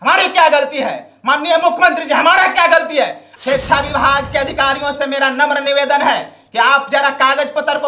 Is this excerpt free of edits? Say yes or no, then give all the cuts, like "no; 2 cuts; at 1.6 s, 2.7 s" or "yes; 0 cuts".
no; 1 cut; at 3.2 s